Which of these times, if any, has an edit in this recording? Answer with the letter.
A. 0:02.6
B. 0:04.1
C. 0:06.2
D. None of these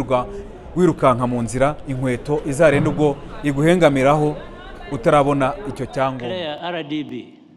C